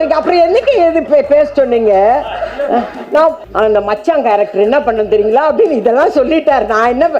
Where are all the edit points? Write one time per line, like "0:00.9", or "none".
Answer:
0:03.4